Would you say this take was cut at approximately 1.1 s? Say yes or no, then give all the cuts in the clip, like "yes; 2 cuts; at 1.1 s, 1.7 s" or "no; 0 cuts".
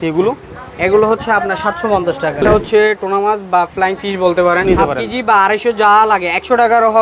no; 2 cuts; at 2.4 s, 4.7 s